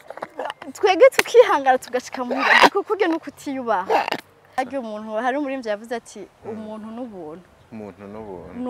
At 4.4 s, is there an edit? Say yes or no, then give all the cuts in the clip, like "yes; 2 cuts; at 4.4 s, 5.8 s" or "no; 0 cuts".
yes; 1 cut; at 4.4 s